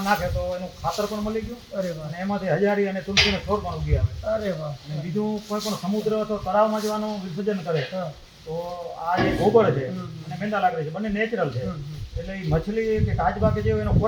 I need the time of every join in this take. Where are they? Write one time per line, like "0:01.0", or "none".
none